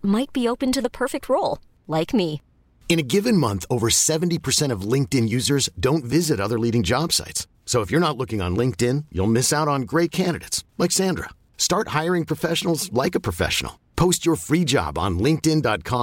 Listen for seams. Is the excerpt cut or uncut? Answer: uncut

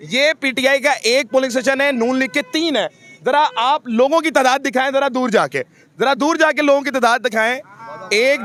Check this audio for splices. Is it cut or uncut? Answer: uncut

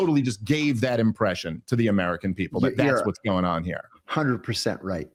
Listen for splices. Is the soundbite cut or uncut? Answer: uncut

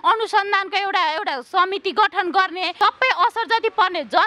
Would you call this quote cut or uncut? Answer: cut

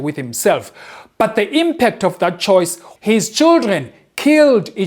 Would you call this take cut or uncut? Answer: cut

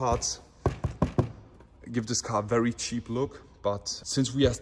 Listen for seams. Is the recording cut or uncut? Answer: uncut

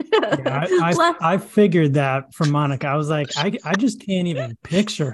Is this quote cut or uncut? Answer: uncut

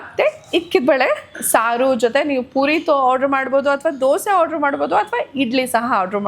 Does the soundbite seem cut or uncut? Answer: uncut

